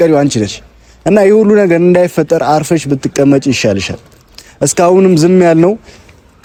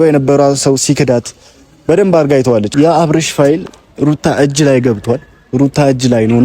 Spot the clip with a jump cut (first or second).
second